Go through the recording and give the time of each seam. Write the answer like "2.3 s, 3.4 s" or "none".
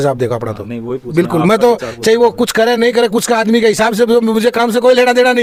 none